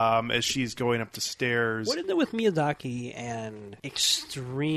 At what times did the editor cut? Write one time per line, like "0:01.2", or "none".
0:03.7

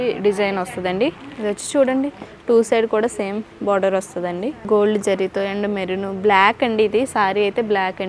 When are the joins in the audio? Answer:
0:01.3
0:04.6

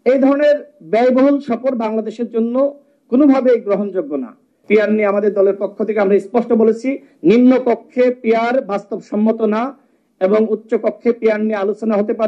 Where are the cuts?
0:04.5

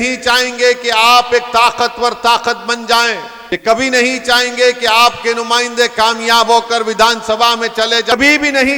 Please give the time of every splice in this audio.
0:03.4
0:08.1

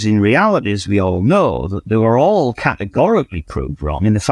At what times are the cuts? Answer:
none

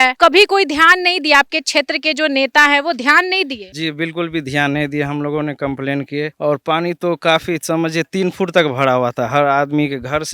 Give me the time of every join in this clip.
none

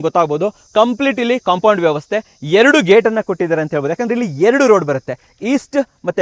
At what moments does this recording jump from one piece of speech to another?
none

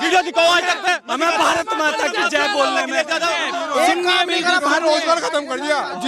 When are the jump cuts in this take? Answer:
0:03.4

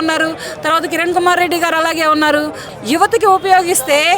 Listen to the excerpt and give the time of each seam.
0:02.7

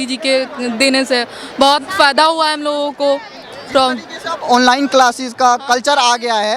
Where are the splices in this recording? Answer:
none

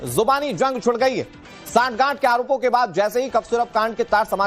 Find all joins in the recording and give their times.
0:02.6

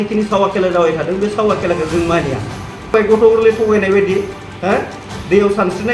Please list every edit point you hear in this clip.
0:02.9

